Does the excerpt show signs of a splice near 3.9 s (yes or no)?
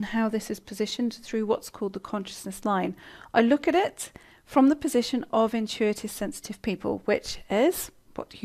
yes